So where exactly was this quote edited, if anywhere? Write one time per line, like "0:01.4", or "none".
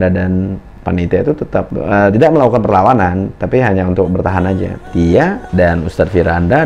0:01.7
0:04.9